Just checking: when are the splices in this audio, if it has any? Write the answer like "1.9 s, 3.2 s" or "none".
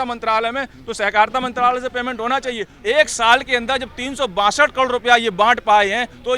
2.7 s